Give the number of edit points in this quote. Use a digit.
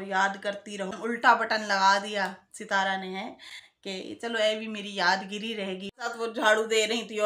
2